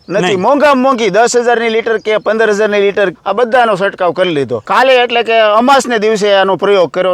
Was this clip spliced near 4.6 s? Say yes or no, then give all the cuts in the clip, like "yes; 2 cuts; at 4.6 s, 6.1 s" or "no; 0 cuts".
yes; 1 cut; at 4.6 s